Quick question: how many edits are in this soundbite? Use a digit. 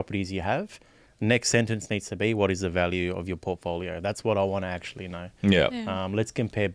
0